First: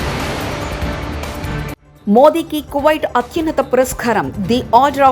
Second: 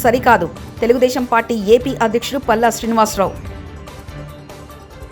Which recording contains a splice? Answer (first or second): first